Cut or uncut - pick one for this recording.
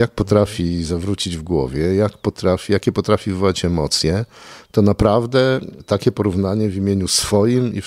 uncut